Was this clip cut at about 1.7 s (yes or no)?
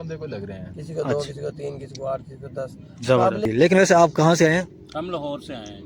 no